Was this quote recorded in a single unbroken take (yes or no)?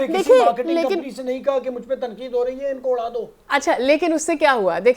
yes